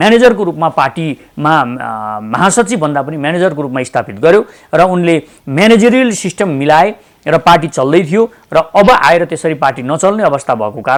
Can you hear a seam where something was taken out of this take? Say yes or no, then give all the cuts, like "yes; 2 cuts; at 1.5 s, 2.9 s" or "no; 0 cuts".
no; 0 cuts